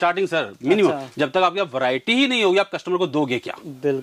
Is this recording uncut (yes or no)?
yes